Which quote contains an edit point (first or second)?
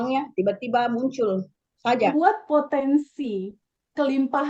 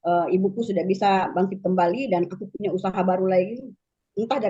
first